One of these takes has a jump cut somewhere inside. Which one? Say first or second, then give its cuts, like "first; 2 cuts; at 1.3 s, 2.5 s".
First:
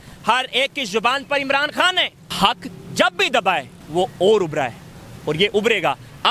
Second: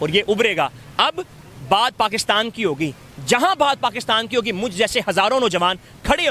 first; 2 cuts; at 2.2 s, 3.8 s